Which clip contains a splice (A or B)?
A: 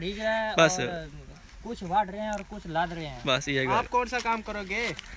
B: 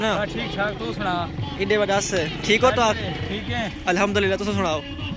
A